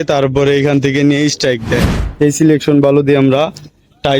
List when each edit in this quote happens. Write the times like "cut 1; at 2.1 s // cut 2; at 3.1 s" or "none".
cut 1; at 2.0 s